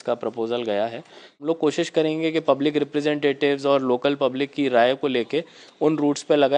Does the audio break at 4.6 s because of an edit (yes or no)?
no